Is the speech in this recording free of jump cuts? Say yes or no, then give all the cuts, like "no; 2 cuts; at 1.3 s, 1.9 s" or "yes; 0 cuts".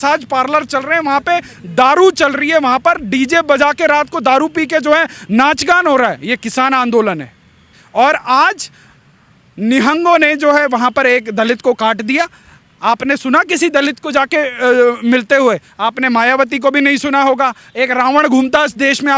yes; 0 cuts